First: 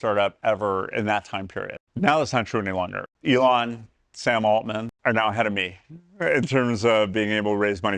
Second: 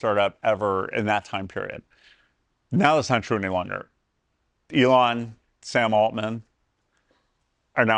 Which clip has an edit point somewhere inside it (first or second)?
first